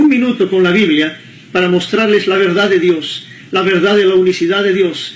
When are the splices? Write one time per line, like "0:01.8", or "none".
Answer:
none

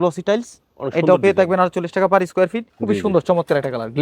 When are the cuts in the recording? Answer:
0:02.7

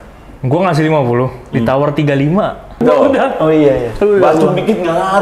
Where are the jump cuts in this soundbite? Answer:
0:02.8

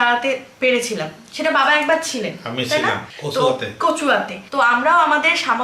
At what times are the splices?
0:03.1
0:04.4

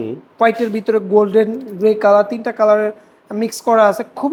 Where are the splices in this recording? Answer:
none

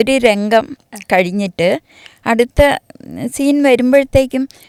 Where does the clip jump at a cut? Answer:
none

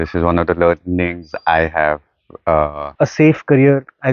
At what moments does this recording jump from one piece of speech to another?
0:02.9

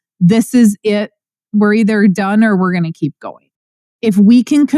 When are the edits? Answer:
0:03.8

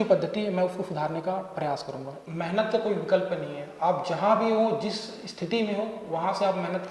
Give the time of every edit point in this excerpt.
0:02.2

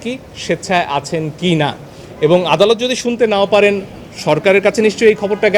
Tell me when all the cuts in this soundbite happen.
none

